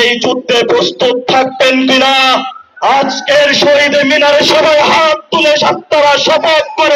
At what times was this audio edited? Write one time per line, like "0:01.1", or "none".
none

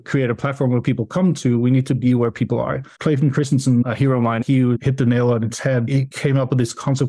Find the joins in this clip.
0:02.9
0:04.3
0:06.0

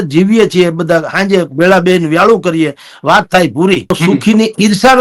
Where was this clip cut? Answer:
0:03.9

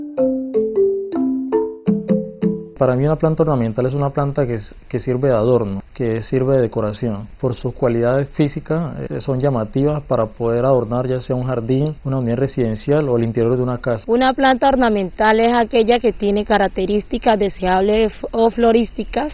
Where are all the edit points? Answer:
none

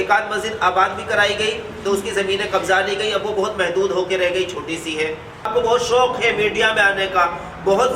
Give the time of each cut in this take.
0:05.5

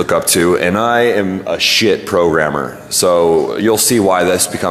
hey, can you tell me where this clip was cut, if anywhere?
0:01.7

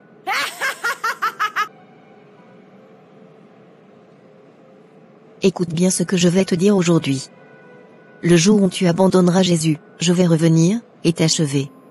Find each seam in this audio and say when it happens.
0:01.7

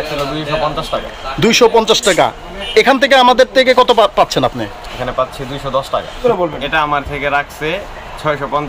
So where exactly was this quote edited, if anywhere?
0:06.2

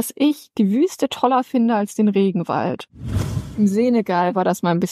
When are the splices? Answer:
0:03.3

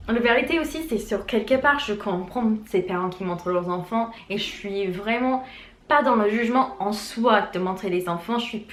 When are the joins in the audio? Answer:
none

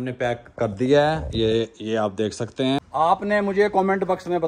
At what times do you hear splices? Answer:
0:02.8

